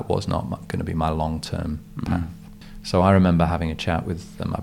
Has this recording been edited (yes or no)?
yes